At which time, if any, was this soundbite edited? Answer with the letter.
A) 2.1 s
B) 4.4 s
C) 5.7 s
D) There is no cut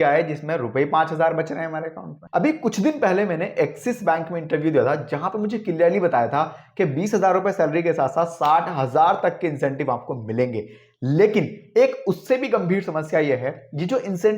A